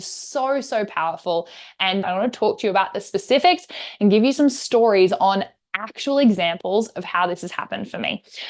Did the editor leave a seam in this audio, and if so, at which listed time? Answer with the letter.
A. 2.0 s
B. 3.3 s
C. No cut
A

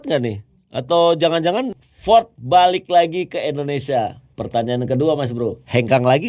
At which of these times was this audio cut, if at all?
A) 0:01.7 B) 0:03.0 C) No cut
A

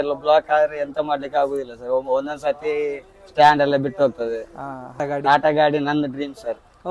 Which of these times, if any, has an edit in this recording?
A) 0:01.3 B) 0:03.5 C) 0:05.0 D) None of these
C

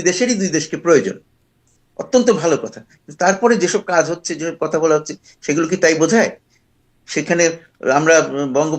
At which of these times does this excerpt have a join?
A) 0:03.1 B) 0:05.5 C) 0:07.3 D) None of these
D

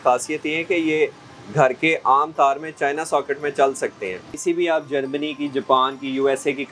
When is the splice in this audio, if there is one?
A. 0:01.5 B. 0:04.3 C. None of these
B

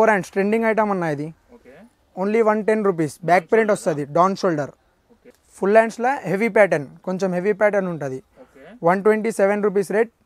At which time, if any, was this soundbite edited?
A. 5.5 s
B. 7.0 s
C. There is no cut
A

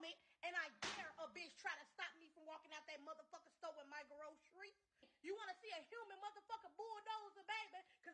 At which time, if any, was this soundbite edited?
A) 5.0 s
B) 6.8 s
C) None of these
A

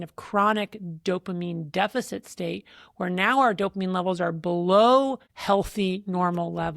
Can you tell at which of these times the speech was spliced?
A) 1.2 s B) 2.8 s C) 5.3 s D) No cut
C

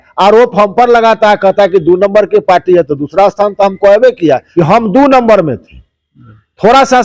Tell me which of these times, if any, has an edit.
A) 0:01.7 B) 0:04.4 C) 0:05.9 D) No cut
B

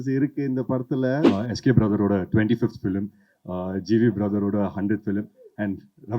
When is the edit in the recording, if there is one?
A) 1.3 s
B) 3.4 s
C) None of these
A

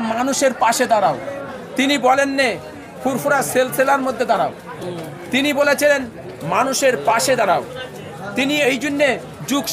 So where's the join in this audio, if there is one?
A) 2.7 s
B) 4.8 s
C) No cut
C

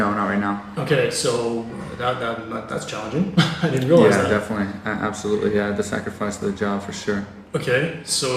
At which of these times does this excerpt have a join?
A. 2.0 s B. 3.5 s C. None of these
B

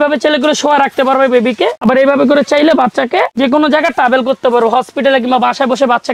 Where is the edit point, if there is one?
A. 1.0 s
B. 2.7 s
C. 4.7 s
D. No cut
D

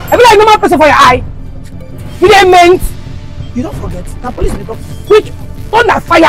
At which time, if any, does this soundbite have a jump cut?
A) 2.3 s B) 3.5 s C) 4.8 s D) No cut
D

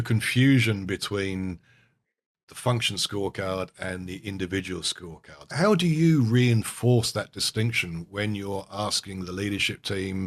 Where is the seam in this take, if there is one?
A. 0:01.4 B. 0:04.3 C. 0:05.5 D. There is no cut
C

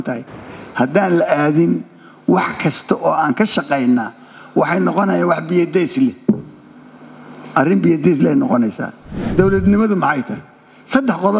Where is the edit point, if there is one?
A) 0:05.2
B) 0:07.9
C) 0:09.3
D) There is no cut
C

